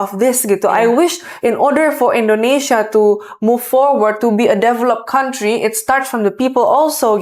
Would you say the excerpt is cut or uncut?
uncut